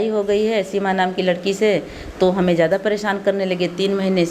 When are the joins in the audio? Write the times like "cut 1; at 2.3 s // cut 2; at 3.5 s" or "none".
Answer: none